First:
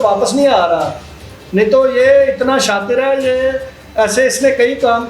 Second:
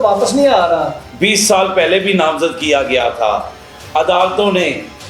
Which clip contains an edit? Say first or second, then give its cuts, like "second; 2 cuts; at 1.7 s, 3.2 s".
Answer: second; 1 cut; at 1.1 s